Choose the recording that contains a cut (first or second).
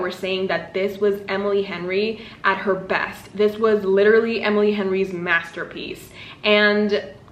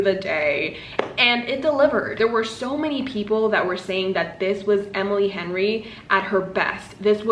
second